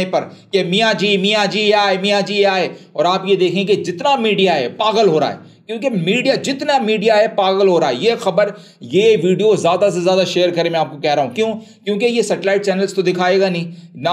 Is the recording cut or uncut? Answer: uncut